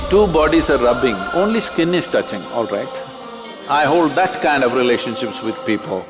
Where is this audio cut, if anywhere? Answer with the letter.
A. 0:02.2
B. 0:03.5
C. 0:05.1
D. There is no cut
B